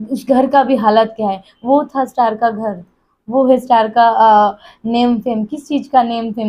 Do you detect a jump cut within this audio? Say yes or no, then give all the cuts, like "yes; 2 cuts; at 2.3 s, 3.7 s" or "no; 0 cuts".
no; 0 cuts